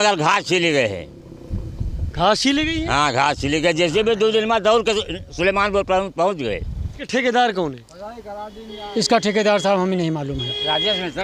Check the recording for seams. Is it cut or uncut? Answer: cut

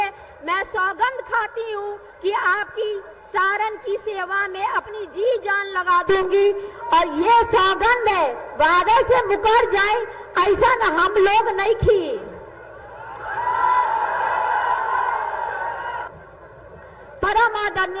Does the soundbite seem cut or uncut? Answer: uncut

